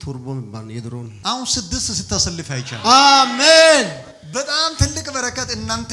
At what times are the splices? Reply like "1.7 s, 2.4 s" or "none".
1.1 s